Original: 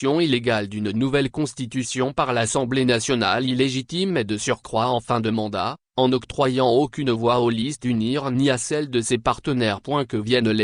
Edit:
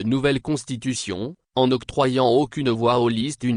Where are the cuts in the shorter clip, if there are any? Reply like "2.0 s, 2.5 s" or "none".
1.0 s